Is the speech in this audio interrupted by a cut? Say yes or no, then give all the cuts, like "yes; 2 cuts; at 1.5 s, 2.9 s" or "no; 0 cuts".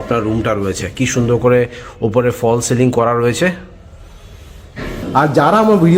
yes; 1 cut; at 5.0 s